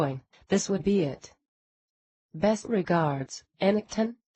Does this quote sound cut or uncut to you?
cut